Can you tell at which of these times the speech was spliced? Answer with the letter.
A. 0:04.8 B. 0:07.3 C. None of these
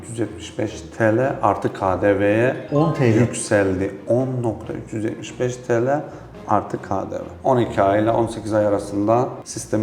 B